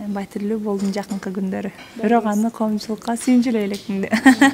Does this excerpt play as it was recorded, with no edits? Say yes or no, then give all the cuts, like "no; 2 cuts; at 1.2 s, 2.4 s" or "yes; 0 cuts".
yes; 0 cuts